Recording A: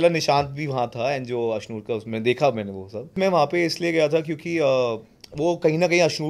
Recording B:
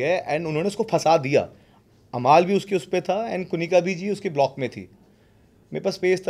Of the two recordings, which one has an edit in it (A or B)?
A